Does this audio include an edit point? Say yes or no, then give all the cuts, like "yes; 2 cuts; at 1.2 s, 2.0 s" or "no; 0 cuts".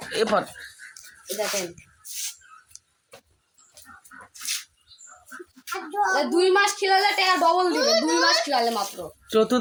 no; 0 cuts